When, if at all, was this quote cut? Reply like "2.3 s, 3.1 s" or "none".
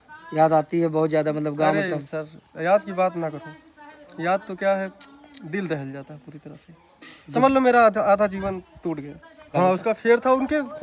9.5 s